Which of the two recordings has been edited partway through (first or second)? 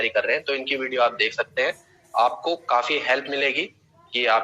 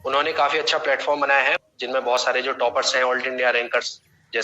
second